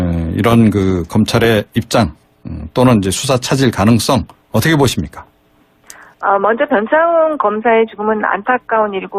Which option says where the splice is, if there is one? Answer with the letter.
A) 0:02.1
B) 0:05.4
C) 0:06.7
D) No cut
B